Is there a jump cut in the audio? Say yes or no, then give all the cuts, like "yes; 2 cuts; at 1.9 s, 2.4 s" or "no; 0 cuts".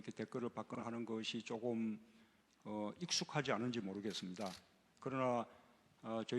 yes; 1 cut; at 5.2 s